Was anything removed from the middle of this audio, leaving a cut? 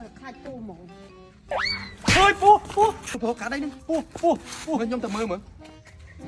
yes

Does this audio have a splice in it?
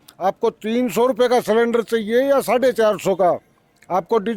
no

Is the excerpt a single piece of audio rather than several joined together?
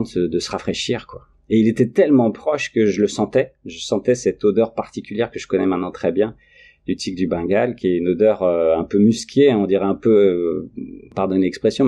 yes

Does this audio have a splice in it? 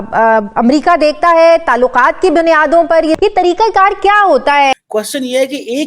yes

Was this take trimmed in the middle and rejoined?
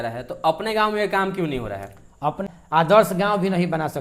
yes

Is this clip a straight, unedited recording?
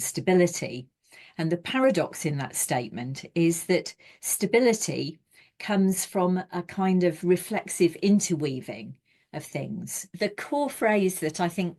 no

